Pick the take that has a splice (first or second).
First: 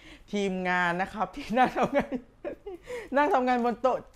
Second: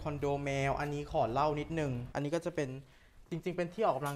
second